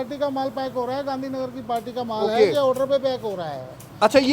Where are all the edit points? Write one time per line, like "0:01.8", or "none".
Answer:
none